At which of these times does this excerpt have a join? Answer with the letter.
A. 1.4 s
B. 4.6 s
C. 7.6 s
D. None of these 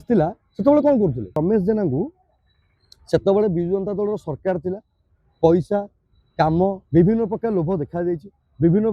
A